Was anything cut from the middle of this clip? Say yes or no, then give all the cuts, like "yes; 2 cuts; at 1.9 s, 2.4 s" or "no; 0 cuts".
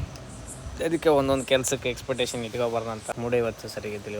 yes; 1 cut; at 3.1 s